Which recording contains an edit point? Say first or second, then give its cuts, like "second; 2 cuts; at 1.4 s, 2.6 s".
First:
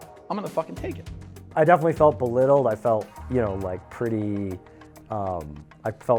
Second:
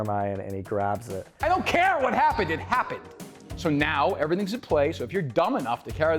second; 1 cut; at 1.4 s